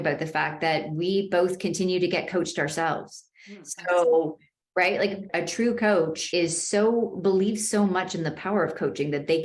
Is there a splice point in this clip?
yes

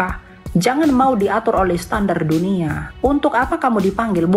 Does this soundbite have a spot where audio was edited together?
yes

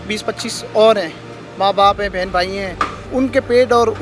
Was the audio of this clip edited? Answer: yes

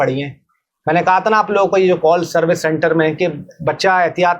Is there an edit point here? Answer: no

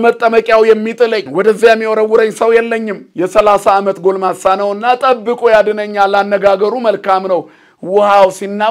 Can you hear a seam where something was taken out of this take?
yes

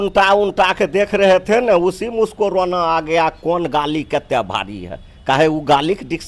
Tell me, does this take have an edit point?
no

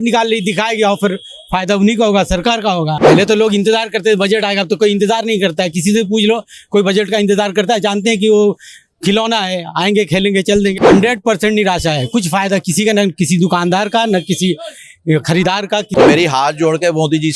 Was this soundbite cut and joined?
yes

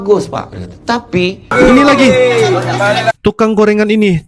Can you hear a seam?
yes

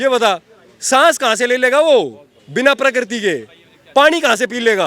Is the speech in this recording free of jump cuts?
yes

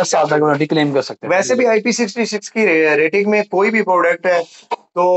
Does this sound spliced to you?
no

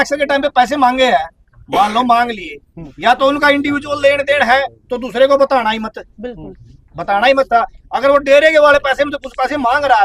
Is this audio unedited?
yes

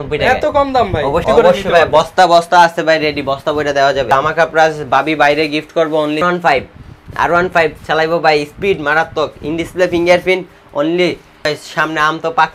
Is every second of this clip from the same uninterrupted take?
no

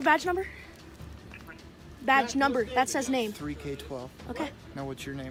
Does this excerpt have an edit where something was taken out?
no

